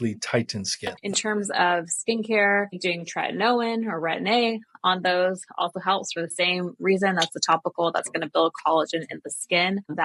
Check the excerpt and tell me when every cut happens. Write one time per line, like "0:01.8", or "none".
0:01.0